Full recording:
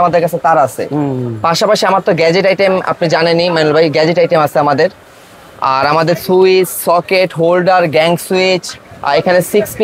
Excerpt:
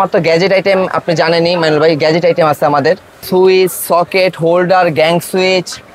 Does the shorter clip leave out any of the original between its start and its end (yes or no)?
yes